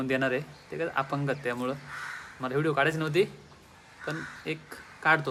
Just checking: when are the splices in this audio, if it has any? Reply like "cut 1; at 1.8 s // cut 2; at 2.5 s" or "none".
none